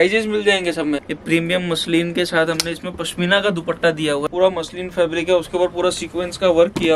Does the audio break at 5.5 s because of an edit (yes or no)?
no